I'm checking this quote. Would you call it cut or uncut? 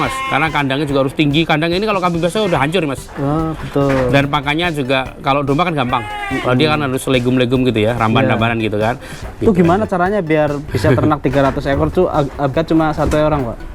cut